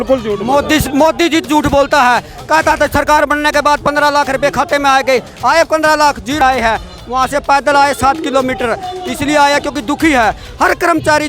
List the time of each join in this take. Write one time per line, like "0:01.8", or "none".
0:01.4
0:06.4